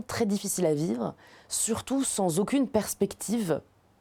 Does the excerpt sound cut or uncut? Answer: uncut